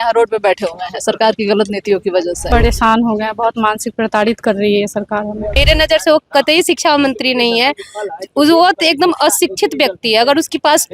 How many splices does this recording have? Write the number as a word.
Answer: two